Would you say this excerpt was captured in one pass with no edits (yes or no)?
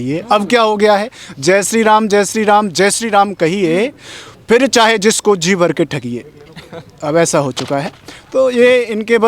yes